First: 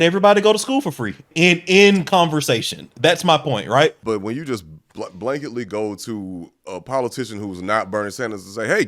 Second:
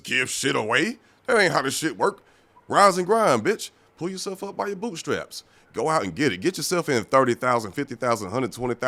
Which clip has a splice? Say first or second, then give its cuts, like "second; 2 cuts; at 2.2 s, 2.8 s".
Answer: first; 2 cuts; at 1.3 s, 4.0 s